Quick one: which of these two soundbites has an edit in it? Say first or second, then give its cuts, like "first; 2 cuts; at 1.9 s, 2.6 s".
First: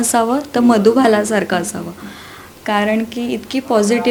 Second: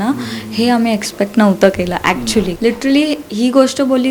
second; 1 cut; at 2.5 s